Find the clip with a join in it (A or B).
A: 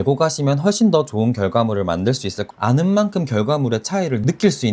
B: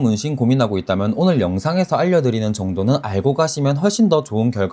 A